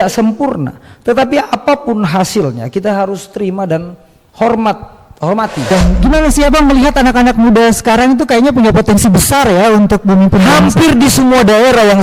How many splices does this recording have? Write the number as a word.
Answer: one